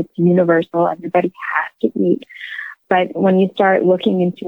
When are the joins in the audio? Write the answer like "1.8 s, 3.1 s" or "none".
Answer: 2.8 s